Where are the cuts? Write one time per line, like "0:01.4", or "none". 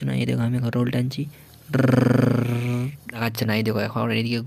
0:03.2